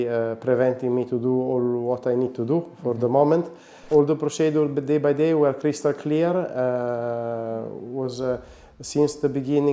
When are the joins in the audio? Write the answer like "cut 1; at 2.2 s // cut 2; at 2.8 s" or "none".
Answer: cut 1; at 3.9 s